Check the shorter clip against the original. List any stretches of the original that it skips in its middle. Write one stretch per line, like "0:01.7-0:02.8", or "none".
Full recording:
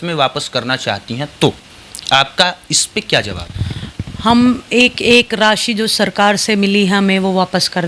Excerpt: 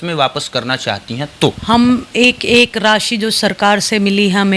0:01.6-0:04.2